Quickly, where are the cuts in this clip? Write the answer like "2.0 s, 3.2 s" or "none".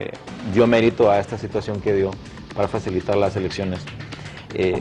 none